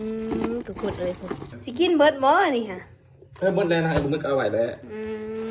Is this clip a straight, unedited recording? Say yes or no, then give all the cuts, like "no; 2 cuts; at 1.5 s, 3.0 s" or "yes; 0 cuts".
no; 1 cut; at 1.6 s